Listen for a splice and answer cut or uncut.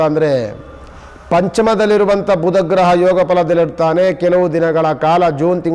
uncut